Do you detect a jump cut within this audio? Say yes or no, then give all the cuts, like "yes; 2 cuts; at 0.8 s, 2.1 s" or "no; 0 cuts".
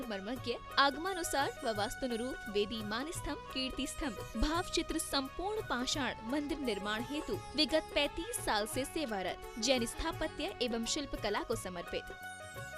no; 0 cuts